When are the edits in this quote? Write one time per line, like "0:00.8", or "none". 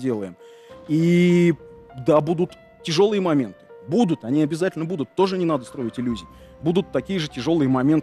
none